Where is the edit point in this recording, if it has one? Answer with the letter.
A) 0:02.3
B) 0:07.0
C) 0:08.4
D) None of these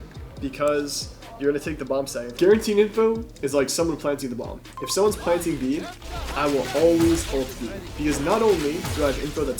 A